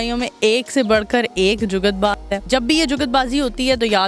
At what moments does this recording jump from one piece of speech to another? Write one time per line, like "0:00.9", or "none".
0:02.4